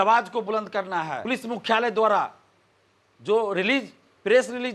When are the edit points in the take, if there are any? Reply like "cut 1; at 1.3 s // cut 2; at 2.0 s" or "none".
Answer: cut 1; at 1.2 s